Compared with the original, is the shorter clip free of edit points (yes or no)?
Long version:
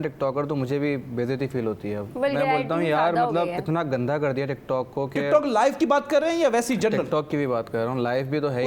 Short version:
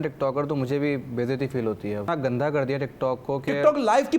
no